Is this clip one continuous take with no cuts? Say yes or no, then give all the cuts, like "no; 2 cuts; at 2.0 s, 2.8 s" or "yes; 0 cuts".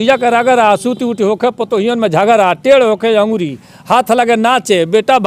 yes; 0 cuts